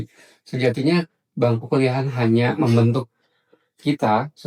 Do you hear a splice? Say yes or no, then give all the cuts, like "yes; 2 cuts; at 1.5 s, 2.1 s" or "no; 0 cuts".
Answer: no; 0 cuts